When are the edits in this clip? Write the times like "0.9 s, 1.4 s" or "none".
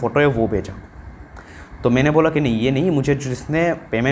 none